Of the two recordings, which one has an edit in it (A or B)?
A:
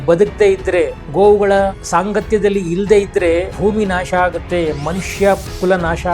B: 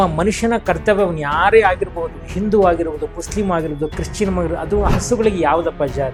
A